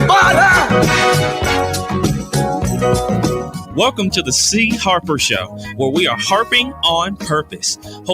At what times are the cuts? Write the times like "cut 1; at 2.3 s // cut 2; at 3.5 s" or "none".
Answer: cut 1; at 4.2 s